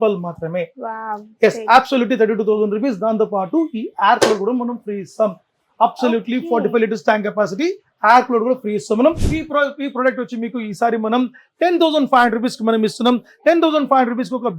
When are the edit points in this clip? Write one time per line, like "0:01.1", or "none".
0:09.2